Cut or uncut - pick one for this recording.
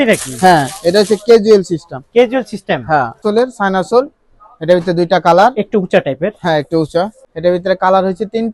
cut